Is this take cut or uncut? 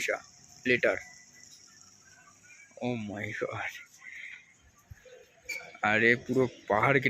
uncut